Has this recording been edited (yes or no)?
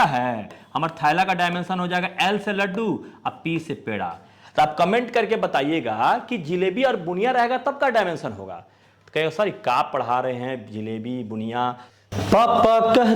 yes